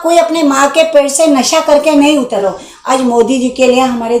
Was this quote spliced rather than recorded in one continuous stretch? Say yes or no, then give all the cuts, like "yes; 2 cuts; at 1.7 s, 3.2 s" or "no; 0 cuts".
yes; 1 cut; at 2.4 s